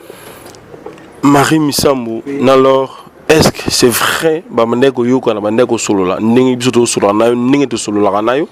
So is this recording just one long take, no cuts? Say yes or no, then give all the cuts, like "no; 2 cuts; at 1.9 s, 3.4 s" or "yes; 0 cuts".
yes; 0 cuts